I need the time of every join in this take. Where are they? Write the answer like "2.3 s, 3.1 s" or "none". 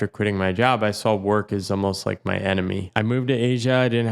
2.8 s